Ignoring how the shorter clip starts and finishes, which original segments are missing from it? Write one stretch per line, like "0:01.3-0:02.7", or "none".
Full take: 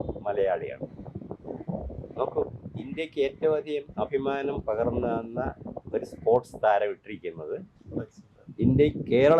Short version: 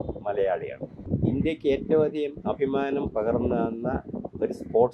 0:01.1-0:02.6

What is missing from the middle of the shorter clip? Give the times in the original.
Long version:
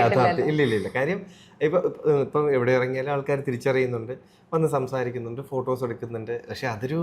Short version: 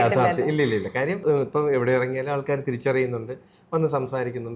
0:01.2-0:02.0

